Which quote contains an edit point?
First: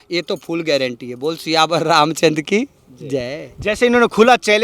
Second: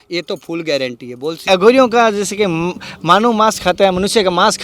second; 1 cut; at 1.4 s

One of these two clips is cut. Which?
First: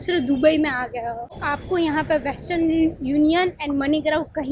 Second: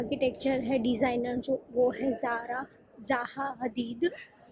first; 1 cut; at 1.4 s

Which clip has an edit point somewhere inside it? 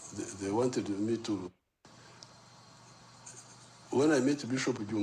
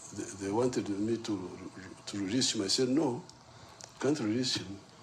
second; 1 cut; at 1.4 s

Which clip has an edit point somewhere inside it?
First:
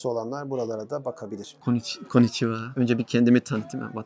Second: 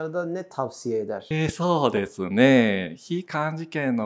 first; 1 cut; at 1.5 s

